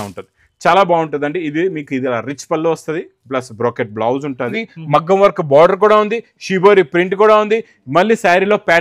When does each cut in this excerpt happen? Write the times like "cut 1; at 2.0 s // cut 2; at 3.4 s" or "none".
cut 1; at 4.7 s